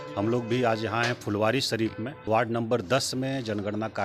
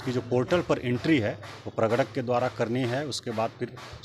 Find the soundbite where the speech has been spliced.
first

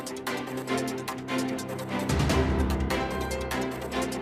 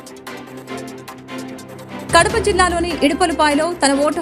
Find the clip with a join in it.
second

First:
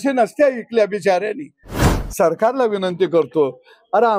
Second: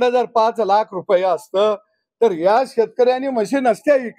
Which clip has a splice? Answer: first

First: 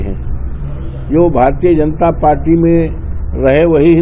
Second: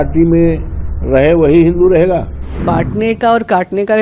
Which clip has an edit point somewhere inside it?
second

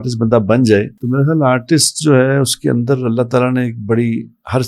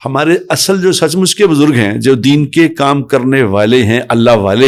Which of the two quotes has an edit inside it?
first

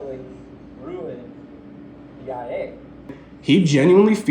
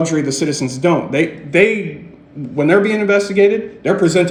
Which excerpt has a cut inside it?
first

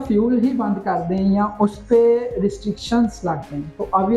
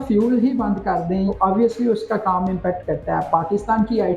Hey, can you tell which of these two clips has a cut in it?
second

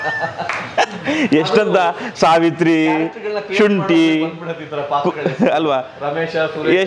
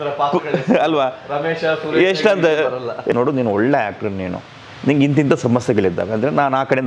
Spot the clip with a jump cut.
second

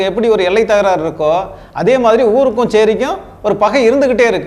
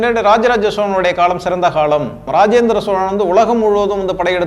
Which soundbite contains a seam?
second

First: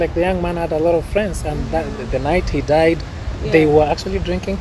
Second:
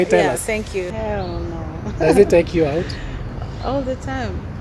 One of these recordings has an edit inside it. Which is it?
second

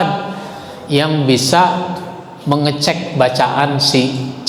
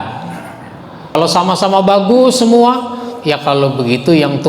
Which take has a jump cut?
second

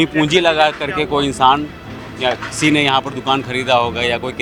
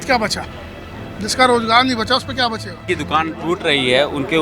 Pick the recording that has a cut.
second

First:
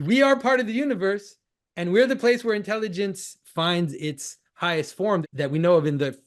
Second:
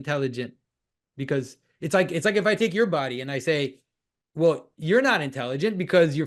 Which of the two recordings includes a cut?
first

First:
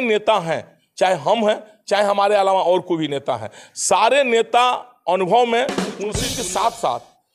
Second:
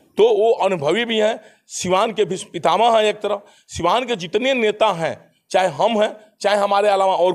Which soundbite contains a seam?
first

